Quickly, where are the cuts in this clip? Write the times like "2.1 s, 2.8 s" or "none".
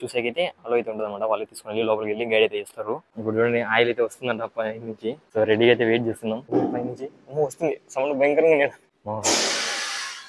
3.1 s, 5.2 s, 6.5 s, 8.9 s